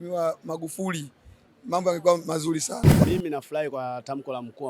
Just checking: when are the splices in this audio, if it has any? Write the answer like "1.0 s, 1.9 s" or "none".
3.0 s

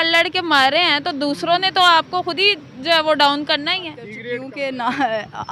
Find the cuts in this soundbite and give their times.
4.1 s

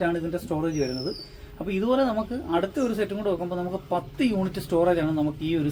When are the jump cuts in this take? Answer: none

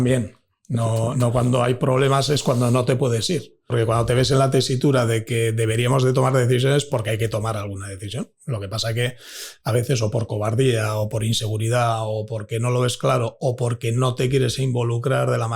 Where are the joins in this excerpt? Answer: 3.7 s

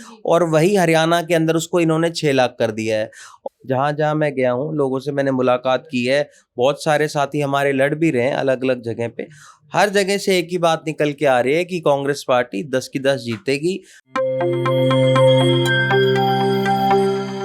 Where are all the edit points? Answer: 3.3 s, 13.9 s

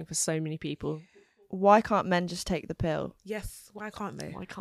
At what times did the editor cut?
1.4 s, 3.2 s

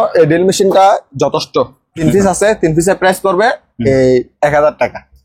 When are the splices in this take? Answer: 1.9 s

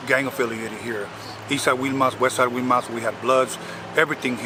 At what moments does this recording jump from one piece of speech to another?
none

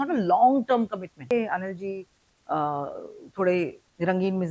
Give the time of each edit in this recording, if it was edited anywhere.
1.3 s

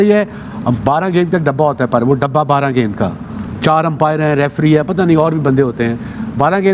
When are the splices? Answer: none

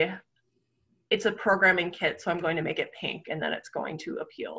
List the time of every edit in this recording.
none

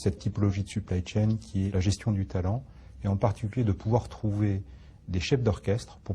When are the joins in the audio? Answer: 2.6 s

